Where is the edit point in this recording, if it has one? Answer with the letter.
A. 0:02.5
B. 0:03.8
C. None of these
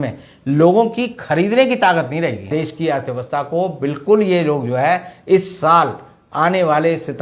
A